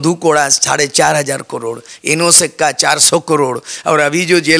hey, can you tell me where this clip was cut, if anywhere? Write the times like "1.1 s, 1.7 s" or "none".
none